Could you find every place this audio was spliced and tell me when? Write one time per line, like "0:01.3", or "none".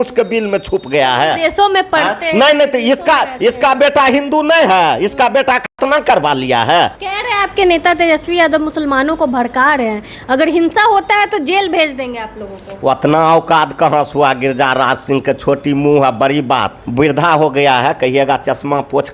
0:07.1
0:16.8